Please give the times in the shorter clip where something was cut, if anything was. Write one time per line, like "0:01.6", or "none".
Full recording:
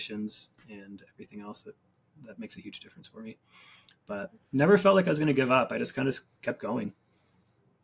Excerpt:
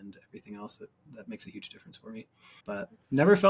0:01.0
0:02.4